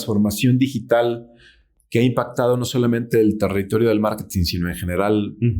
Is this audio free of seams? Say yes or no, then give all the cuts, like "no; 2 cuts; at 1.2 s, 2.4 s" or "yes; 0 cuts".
yes; 0 cuts